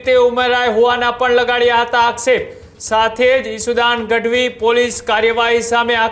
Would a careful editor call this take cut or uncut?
uncut